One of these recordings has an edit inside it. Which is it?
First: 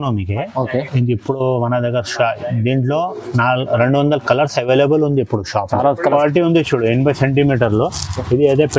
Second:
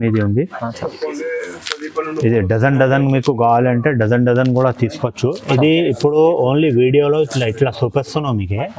first; 1 cut; at 6.1 s

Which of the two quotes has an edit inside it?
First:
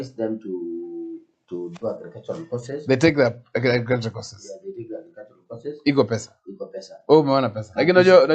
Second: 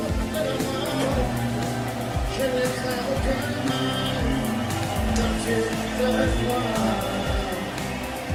first; 1 cut; at 2.0 s

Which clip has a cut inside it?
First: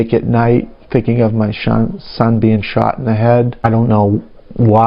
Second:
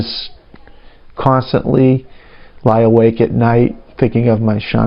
first; 1 cut; at 3.7 s

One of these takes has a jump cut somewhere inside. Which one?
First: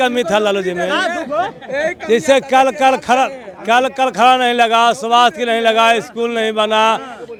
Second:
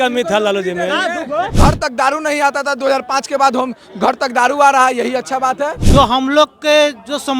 second; 2 cuts; at 1.5 s, 5.8 s

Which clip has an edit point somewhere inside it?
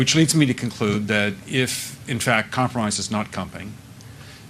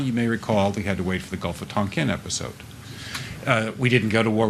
second; 1 cut; at 3.3 s

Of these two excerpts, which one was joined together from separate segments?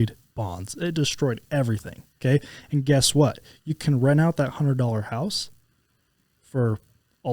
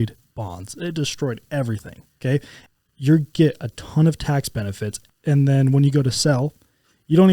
second; 2 cuts; at 2.6 s, 4.9 s

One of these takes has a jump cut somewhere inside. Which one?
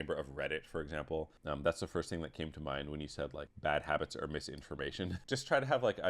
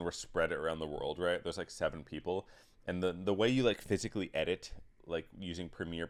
first; 3 cuts; at 1.4 s, 3.5 s, 5.2 s

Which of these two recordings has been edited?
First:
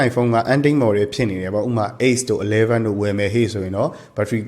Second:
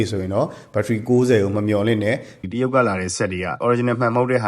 second; 2 cuts; at 2.3 s, 3.6 s

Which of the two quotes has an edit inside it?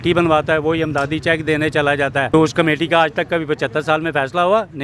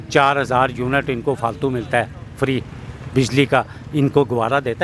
first; 1 cut; at 2.3 s

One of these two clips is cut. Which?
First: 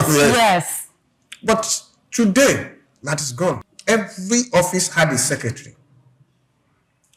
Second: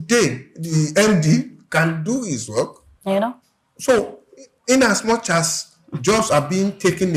first; 1 cut; at 3.7 s

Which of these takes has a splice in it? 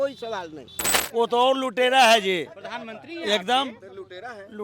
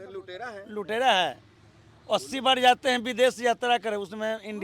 first; 1 cut; at 0.9 s

